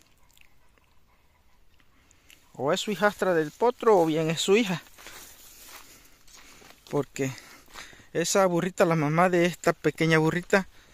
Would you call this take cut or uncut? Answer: uncut